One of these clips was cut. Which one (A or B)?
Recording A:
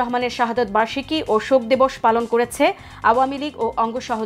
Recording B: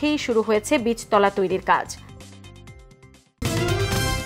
B